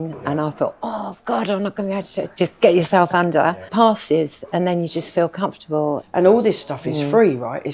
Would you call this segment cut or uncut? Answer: cut